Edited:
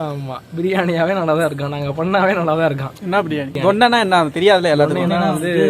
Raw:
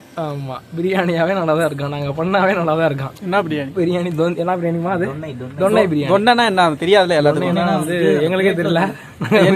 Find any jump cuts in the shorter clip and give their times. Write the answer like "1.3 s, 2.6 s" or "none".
3.5 s